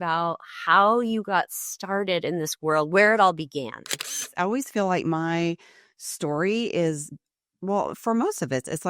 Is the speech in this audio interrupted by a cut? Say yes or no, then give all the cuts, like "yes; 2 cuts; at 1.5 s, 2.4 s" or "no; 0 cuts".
yes; 1 cut; at 4.3 s